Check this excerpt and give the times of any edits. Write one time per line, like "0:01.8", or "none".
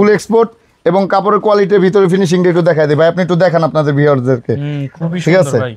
none